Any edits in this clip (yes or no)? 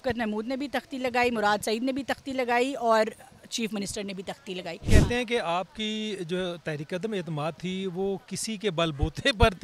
yes